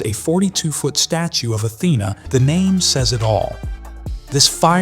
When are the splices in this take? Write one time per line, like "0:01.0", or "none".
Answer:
0:02.2